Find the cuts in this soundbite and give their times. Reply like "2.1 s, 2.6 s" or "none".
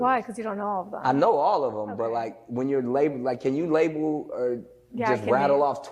1.5 s, 3.2 s